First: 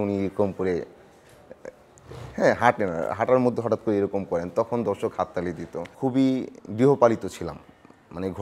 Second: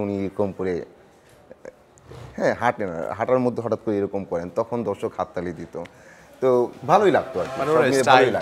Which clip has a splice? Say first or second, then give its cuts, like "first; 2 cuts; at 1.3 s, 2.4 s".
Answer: first; 1 cut; at 5.9 s